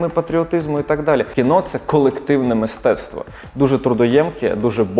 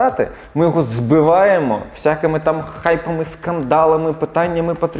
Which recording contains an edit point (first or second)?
first